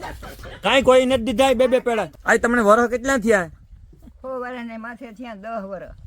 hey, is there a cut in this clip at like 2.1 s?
yes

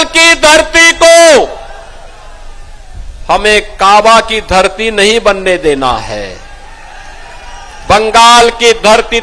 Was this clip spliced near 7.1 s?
no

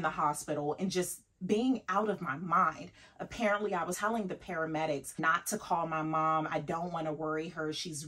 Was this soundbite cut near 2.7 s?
no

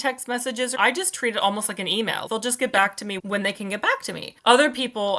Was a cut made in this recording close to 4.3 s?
yes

